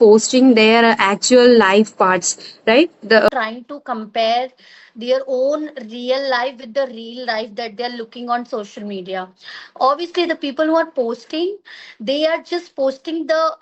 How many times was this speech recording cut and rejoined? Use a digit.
1